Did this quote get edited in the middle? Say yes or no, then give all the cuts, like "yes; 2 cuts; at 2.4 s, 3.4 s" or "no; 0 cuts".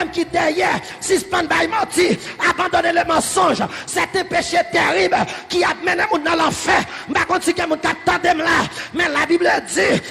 no; 0 cuts